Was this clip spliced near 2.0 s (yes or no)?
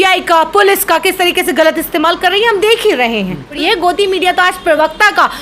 no